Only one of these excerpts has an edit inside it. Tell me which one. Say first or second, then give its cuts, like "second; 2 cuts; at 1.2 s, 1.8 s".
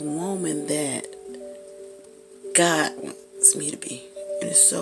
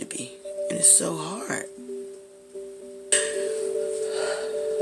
second; 1 cut; at 3.1 s